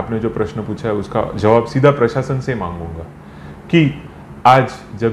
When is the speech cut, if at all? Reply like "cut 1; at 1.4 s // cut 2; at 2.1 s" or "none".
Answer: none